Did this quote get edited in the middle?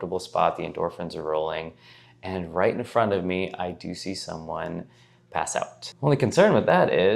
yes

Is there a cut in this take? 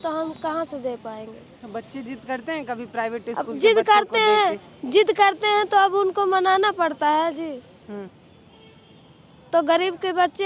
no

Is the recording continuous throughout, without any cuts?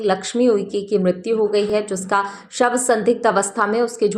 yes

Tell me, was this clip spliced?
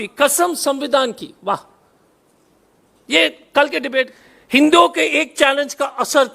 yes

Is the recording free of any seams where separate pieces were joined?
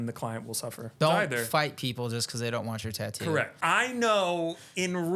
no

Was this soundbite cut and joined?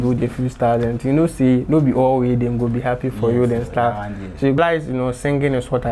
yes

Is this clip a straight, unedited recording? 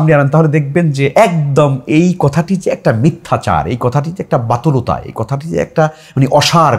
yes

